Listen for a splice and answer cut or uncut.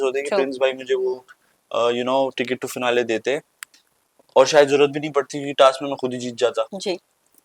uncut